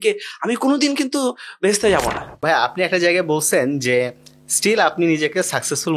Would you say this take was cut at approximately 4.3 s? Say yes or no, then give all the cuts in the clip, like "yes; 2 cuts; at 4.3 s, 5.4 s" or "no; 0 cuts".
no; 1 cut; at 2.3 s